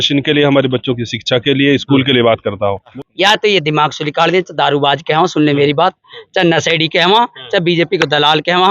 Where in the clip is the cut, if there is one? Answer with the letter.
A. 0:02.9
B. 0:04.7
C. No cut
A